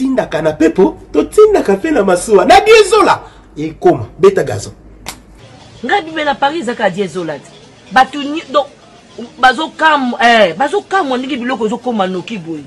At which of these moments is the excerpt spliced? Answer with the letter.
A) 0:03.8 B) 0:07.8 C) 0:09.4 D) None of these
D